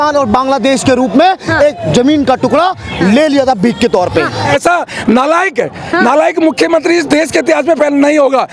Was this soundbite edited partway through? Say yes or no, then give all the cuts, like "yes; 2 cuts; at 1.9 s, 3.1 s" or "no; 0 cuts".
yes; 1 cut; at 4.5 s